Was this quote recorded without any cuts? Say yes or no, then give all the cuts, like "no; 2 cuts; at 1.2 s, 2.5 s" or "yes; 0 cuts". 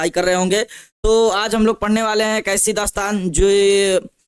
no; 1 cut; at 1.4 s